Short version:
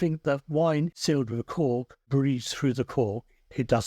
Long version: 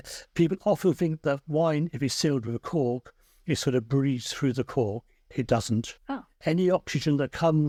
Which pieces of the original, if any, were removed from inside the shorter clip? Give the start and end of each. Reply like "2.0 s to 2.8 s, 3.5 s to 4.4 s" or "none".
2.0 s to 2.1 s, 3.2 s to 3.9 s